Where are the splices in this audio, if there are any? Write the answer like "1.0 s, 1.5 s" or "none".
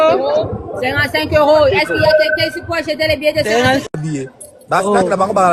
none